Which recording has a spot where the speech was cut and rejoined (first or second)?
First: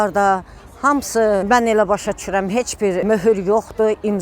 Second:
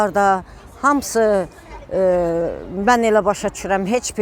first